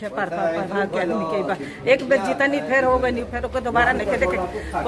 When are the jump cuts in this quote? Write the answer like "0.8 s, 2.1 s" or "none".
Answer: none